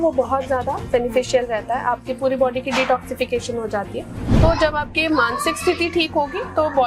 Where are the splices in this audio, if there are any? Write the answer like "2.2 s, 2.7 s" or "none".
4.2 s